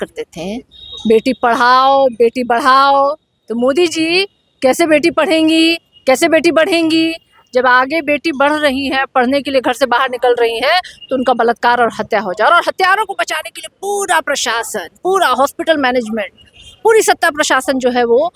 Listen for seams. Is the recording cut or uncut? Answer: uncut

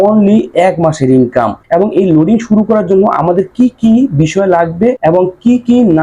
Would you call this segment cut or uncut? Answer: cut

